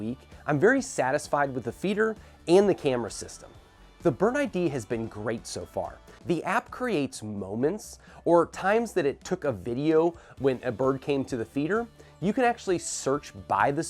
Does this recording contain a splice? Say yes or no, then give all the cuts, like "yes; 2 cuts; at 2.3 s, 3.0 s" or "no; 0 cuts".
yes; 1 cut; at 6.1 s